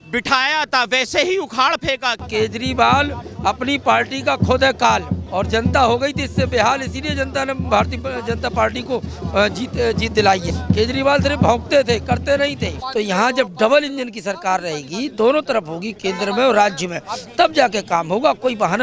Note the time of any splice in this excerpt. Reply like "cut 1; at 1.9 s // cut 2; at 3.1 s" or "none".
cut 1; at 2.3 s // cut 2; at 5.2 s // cut 3; at 10.5 s // cut 4; at 12.8 s